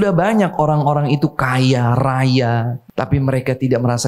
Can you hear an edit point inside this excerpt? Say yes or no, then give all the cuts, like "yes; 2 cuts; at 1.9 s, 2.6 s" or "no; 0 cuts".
yes; 1 cut; at 2.8 s